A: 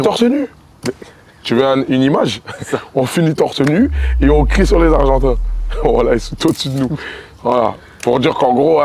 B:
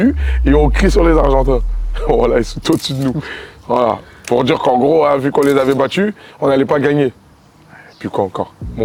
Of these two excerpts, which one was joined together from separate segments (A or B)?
A